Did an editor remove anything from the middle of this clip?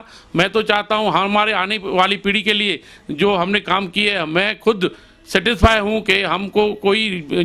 no; 0 cuts

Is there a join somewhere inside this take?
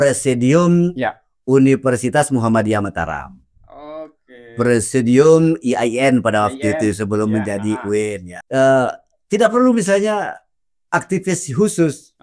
yes; 1 cut; at 8.3 s

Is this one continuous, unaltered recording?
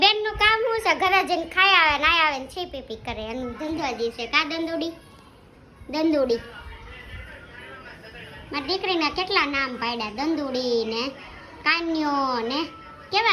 yes; 0 cuts

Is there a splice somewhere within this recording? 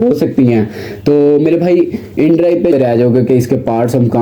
yes; 1 cut; at 2.7 s

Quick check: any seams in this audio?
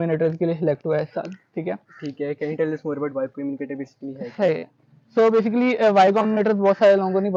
no; 0 cuts

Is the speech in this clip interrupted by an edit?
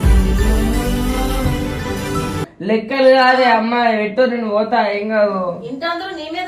yes; 1 cut; at 2.5 s

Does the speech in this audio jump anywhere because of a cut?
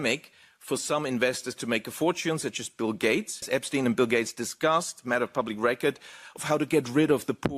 yes; 1 cut; at 3.5 s

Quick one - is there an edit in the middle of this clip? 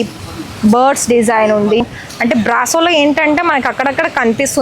yes; 1 cut; at 1.8 s

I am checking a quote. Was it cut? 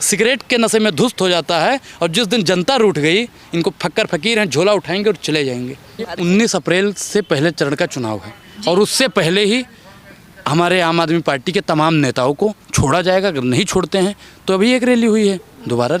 yes; 1 cut; at 6.1 s

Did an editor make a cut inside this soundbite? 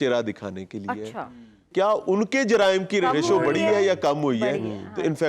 yes; 2 cuts; at 1.7 s, 3.0 s

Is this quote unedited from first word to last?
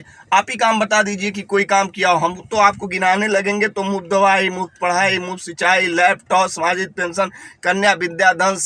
yes; 0 cuts

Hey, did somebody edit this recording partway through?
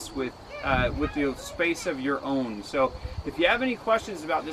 no; 0 cuts

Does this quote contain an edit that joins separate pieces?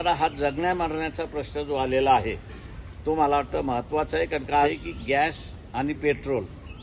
yes; 1 cut; at 4.8 s

